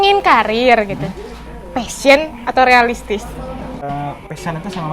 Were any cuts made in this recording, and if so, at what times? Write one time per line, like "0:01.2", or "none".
0:03.8